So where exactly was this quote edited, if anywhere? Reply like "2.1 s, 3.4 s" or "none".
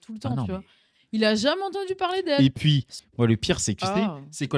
3.0 s